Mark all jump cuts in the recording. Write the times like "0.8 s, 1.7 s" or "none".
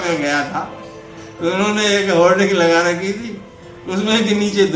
none